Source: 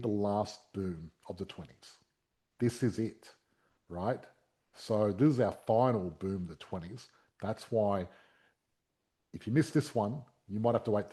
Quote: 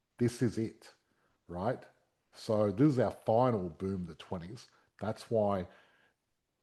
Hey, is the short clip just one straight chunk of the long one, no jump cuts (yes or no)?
yes